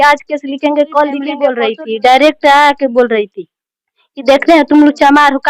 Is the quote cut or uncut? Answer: cut